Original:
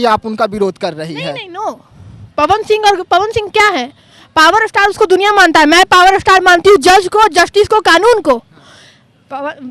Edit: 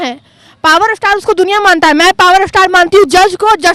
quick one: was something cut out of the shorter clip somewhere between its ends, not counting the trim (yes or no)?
no